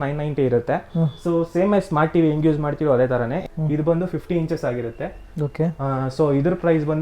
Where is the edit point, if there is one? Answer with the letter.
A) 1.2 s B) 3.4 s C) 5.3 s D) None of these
B